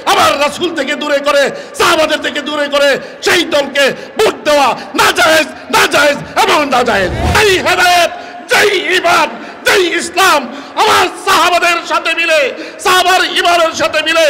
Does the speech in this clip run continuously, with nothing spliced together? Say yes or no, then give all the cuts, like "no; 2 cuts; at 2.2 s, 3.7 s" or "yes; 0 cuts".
no; 1 cut; at 7.2 s